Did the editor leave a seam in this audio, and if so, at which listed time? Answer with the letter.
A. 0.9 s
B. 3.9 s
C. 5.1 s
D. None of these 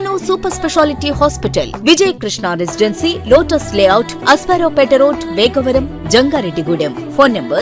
D